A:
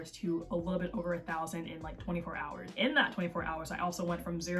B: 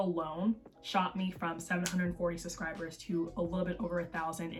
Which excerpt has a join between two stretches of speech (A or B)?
A